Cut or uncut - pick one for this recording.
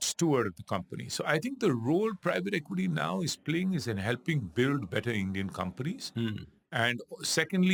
uncut